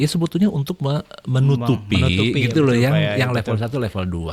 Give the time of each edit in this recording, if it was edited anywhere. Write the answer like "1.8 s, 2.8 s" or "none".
none